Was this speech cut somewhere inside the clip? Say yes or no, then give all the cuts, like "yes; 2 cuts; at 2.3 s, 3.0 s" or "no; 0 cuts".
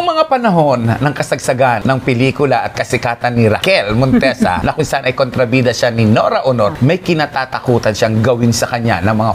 no; 0 cuts